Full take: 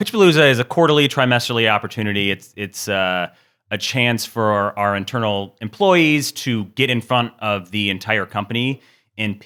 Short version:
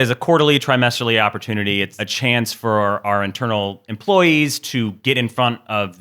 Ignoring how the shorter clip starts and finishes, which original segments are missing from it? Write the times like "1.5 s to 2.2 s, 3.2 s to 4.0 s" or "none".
2.5 s to 3.7 s